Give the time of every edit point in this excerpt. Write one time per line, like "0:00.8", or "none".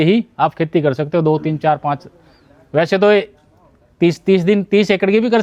none